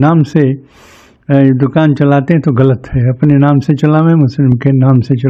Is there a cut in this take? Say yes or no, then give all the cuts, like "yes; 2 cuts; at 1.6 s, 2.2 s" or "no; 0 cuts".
no; 0 cuts